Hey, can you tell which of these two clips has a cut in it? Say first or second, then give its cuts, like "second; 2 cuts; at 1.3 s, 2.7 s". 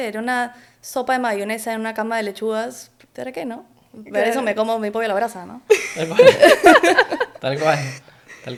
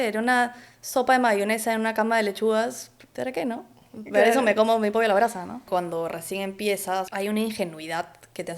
second; 2 cuts; at 5.6 s, 7.1 s